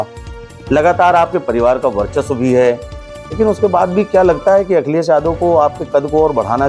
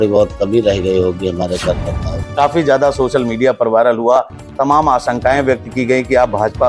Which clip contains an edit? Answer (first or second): second